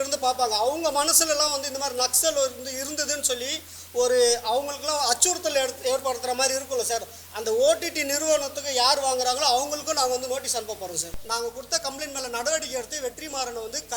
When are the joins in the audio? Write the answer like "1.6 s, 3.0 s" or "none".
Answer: 11.2 s